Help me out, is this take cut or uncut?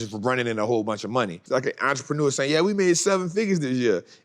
cut